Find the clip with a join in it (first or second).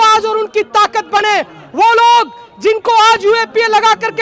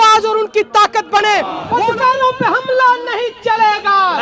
second